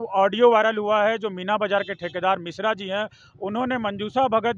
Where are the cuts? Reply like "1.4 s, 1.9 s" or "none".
none